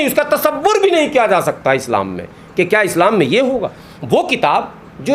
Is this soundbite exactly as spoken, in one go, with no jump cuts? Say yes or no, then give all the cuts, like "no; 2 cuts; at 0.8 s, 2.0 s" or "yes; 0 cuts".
yes; 0 cuts